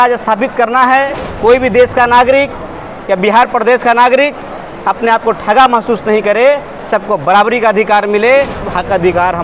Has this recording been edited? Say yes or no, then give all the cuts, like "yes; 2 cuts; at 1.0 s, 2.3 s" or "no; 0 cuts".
yes; 2 cuts; at 1.2 s, 8.7 s